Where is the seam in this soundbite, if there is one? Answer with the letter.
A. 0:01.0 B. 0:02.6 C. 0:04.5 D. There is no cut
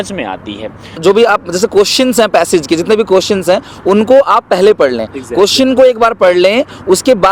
A